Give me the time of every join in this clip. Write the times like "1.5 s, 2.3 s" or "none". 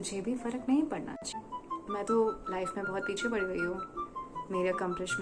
1.3 s